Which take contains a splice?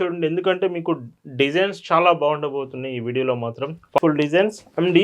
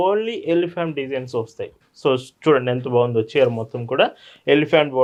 first; 1 cut; at 4.0 s

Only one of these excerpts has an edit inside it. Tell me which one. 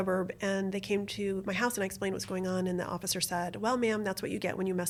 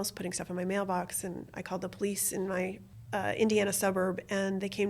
second; 1 cut; at 2.9 s

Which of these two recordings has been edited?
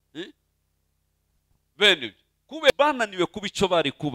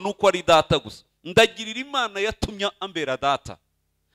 first; 1 cut; at 2.7 s

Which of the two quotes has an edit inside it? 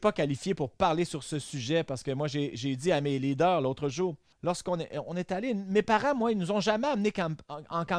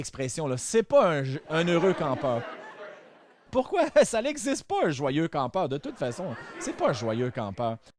first; 1 cut; at 4.3 s

